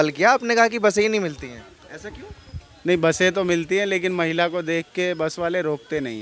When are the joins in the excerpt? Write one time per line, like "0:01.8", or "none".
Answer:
none

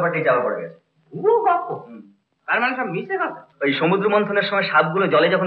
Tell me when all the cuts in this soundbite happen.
0:03.4

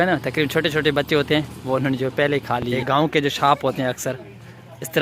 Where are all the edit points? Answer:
0:02.8

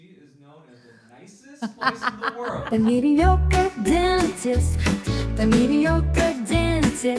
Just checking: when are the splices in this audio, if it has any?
0:02.6

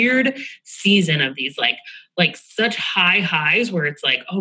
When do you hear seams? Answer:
none

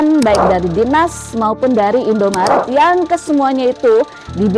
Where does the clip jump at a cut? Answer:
none

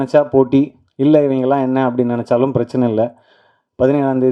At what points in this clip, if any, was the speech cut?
none

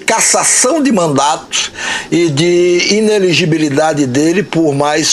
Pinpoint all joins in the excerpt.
none

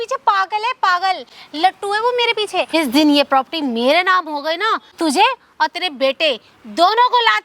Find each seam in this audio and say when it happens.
0:02.7
0:04.9

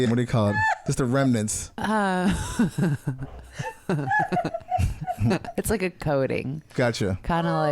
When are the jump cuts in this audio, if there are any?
0:06.6

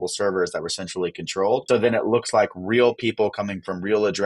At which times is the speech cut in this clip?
0:01.6

